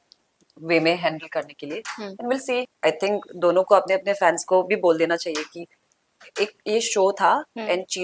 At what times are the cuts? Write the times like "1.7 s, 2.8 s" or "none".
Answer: 2.7 s